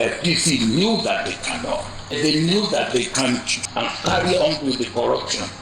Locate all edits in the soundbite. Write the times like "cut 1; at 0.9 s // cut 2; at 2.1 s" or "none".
cut 1; at 2.2 s // cut 2; at 3.7 s